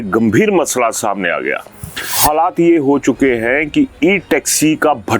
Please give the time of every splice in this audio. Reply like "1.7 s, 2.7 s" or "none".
2.1 s